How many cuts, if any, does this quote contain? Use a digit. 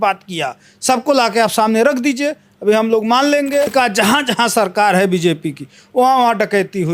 1